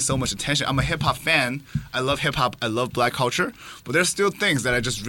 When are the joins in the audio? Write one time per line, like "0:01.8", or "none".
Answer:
none